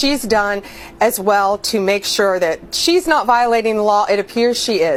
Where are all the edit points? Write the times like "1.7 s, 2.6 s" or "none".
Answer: none